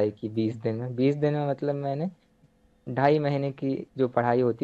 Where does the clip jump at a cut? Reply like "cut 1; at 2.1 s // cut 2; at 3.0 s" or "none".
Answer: cut 1; at 2.4 s